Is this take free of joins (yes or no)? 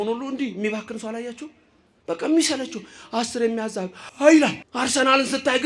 no